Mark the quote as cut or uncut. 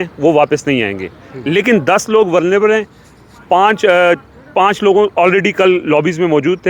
uncut